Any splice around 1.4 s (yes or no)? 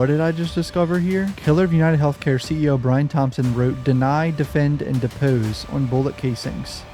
yes